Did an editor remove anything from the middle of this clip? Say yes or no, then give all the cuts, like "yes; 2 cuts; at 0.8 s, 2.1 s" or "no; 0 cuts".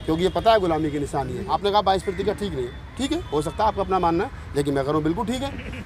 yes; 1 cut; at 1.5 s